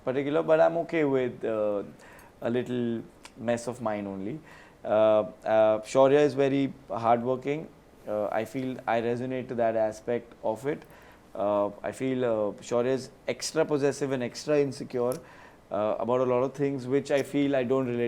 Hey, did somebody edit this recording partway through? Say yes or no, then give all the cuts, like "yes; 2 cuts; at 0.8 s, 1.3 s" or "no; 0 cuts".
no; 0 cuts